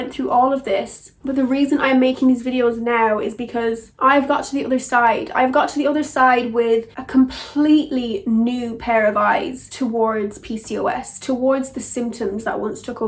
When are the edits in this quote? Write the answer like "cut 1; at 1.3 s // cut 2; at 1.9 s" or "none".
none